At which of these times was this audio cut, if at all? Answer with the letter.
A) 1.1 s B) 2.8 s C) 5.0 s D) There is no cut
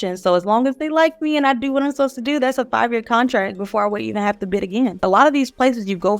C